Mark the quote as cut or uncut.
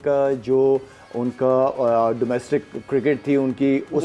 uncut